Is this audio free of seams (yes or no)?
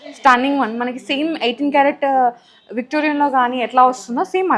yes